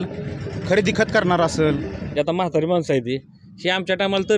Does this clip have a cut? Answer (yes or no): yes